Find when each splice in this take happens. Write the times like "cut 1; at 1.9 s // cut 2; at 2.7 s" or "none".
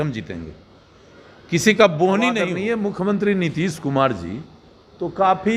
cut 1; at 2.5 s

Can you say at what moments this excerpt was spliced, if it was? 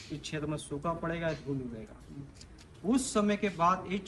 none

